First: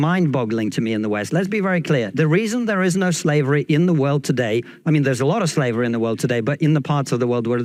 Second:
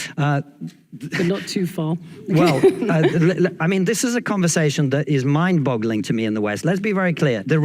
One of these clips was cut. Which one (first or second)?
second